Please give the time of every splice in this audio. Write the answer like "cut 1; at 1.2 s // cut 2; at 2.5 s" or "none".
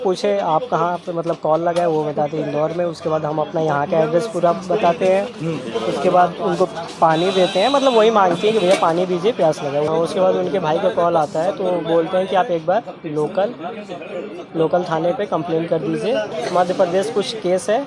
cut 1; at 9.9 s // cut 2; at 16.4 s